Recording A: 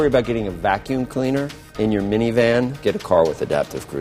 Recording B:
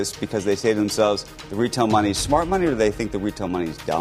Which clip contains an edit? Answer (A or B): A